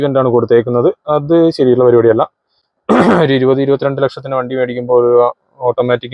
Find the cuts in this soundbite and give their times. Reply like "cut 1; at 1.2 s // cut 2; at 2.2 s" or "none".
none